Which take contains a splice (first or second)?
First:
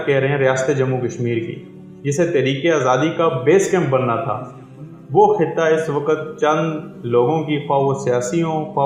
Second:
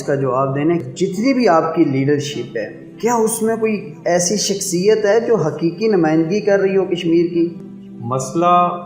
second